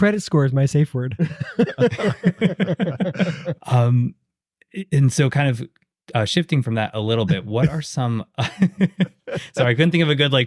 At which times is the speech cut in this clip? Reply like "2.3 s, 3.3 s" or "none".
3.6 s